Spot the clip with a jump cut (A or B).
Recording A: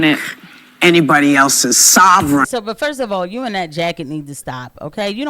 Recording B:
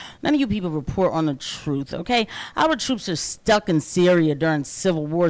A